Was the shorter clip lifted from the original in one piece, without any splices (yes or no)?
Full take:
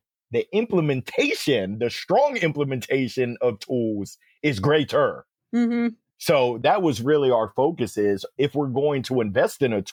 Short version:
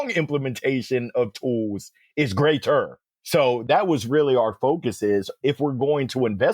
no